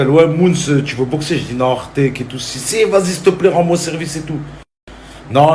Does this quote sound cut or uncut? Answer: uncut